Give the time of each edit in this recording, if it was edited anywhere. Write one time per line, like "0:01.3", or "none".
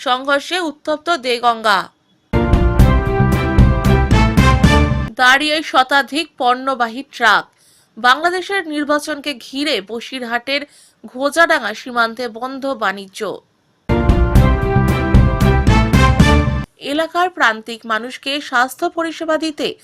0:02.1
0:13.7
0:16.6